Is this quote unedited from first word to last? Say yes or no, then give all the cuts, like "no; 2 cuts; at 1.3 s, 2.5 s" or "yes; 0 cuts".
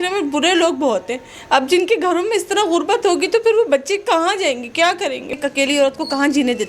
no; 1 cut; at 5.3 s